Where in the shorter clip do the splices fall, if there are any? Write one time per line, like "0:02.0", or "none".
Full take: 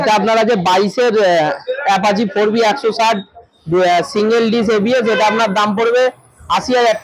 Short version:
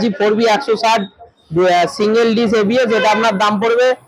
none